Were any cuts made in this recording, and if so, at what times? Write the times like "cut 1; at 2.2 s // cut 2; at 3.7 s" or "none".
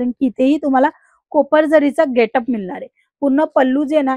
none